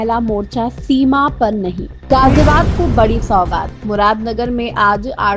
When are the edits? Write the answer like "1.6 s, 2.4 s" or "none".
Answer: 1.9 s